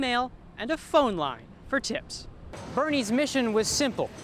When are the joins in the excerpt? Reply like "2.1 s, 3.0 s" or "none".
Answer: 2.6 s